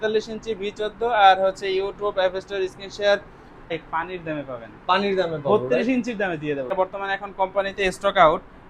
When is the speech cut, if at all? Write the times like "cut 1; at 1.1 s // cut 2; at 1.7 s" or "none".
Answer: cut 1; at 3.8 s // cut 2; at 6.7 s